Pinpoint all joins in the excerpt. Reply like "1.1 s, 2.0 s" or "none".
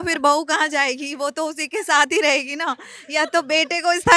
none